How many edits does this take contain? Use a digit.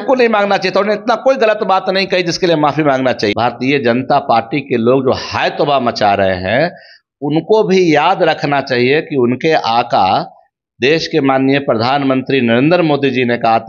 1